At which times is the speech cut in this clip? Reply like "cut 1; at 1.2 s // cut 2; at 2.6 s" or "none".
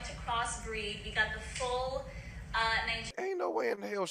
cut 1; at 3.1 s